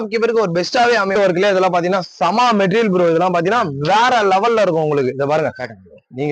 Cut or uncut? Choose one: cut